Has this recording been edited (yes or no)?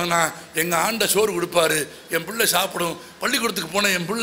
no